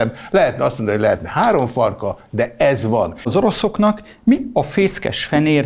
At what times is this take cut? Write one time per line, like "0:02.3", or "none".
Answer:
0:03.3